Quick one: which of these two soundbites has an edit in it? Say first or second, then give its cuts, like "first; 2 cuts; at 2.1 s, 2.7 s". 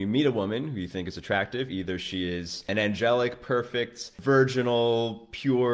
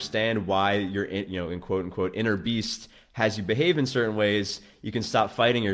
first; 2 cuts; at 2.7 s, 4.1 s